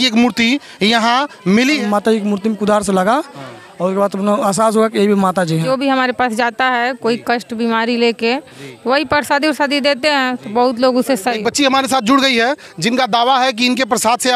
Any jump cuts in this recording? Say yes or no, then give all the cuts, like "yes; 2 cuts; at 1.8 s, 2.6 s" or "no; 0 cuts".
yes; 3 cuts; at 1.8 s, 5.6 s, 11.4 s